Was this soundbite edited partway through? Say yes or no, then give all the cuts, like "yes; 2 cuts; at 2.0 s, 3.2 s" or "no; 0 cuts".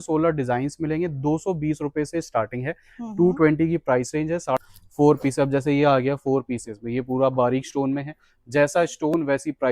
yes; 1 cut; at 4.6 s